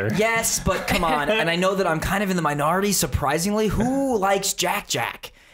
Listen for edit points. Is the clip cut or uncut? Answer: uncut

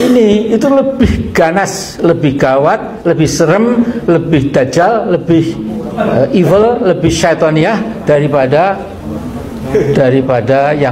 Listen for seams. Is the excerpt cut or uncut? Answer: uncut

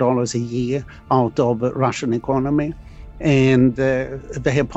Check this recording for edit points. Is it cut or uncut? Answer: uncut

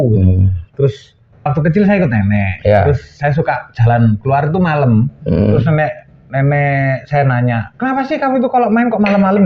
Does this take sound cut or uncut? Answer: cut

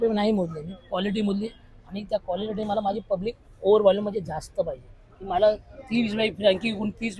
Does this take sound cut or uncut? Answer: uncut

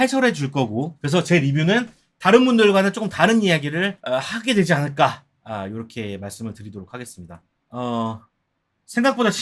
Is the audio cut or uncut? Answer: cut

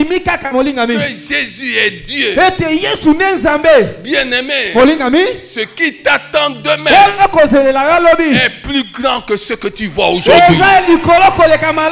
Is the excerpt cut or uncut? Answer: uncut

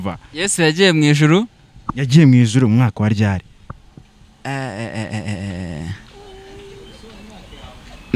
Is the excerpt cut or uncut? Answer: uncut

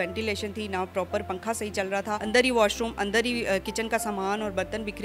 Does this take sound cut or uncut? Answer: cut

